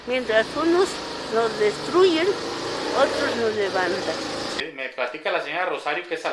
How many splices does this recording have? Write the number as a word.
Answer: one